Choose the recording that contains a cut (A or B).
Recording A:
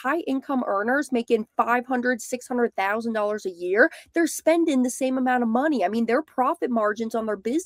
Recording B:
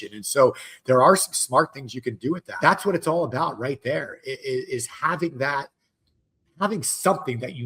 B